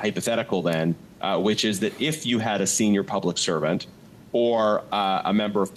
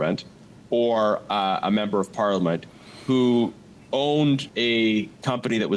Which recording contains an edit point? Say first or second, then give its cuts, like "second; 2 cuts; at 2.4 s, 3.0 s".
second; 1 cut; at 4.5 s